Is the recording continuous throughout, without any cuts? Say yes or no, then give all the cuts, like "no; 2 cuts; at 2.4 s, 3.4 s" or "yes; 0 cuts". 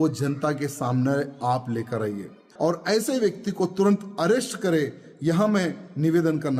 no; 1 cut; at 2.4 s